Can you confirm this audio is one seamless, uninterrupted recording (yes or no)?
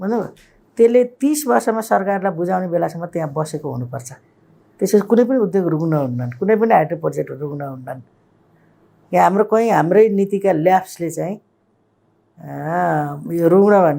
yes